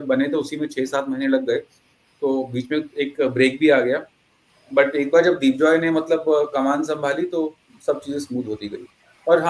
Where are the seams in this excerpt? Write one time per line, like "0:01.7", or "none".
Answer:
none

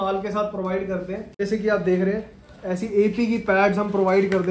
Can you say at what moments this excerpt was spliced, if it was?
0:01.2

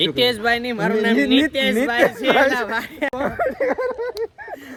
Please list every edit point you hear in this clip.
none

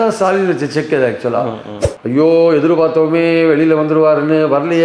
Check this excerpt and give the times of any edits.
0:01.7

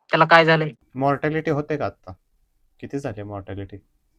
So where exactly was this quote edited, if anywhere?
none

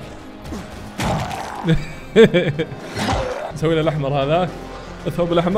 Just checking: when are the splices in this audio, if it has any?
0:03.4

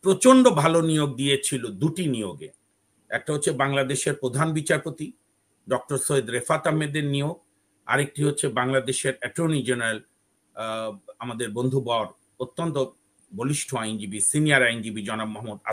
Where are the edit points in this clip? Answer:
none

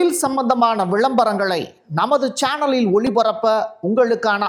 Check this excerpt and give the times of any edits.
none

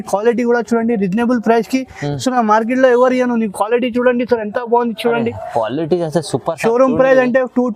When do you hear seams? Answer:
none

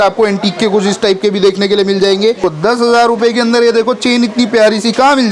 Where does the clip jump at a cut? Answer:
0:02.4

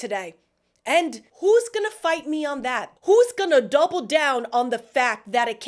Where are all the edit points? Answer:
0:01.2
0:02.9

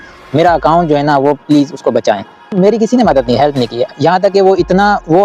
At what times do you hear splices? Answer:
0:02.5

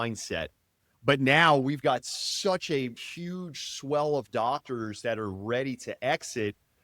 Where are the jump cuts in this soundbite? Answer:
0:03.0

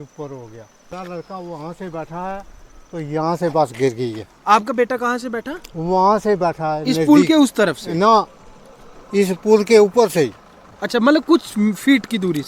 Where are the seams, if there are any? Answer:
0:00.9

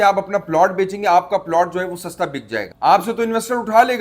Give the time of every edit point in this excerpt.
none

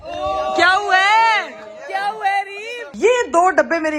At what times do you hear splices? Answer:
0:02.8

